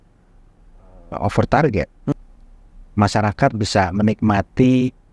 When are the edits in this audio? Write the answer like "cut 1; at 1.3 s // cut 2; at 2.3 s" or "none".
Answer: cut 1; at 2.1 s